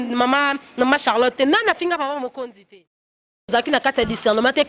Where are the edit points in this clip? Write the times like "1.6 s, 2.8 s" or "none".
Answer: 3.5 s